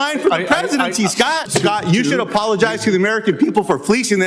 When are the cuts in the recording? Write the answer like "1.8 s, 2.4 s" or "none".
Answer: 1.5 s